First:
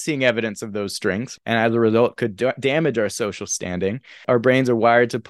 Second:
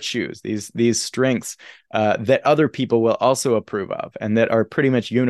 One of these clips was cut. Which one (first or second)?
first